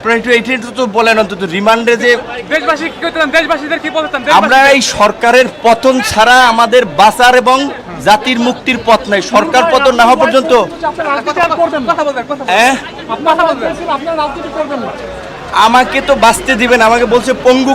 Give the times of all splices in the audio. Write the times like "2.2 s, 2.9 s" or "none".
none